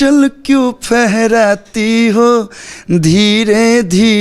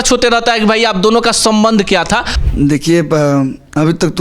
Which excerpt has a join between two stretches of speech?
second; 1 cut; at 2.3 s

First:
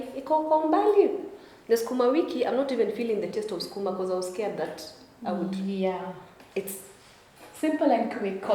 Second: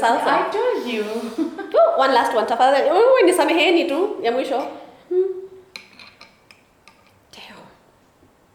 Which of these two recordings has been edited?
first; 1 cut; at 6.4 s

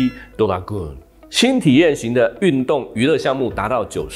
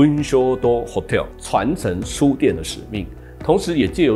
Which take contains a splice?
second; 1 cut; at 1.3 s

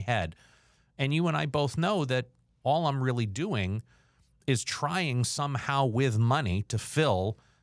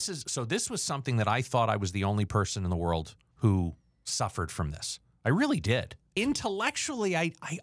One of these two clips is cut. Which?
second; 2 cuts; at 3.2 s, 6.2 s

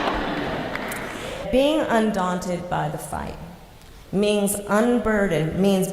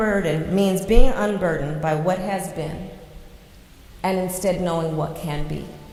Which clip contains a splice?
first; 1 cut; at 1.4 s

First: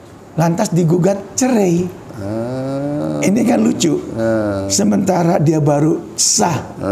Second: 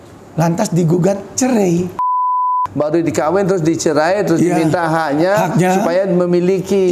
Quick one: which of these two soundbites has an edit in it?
second; 1 cut; at 2.5 s

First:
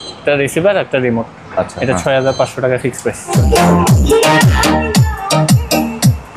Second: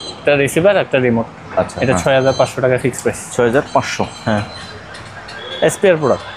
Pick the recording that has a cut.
first; 1 cut; at 3.3 s

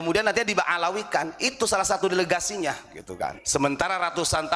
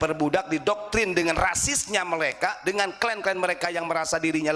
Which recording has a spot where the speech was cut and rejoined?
first; 1 cut; at 3.4 s

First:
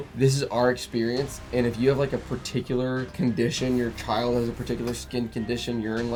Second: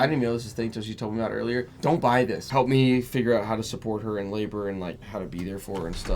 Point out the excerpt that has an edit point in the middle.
second; 2 cuts; at 2.4 s, 5.0 s

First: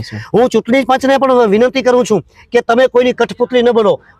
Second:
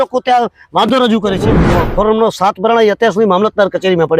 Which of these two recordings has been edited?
second; 1 cut; at 1.5 s

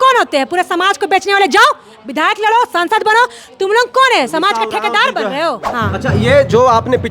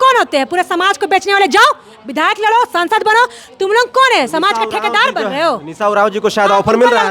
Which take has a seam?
first; 1 cut; at 5.7 s

